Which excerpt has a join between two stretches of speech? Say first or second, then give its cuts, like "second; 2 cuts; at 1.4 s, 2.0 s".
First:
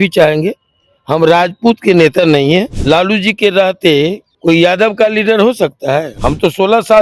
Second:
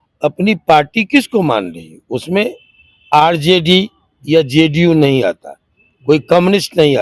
first; 3 cuts; at 2.7 s, 4.3 s, 6.1 s